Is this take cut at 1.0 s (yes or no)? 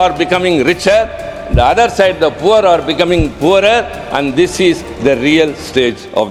no